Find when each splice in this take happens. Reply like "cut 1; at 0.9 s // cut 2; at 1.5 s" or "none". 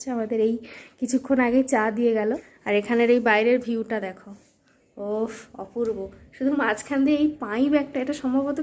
cut 1; at 2.5 s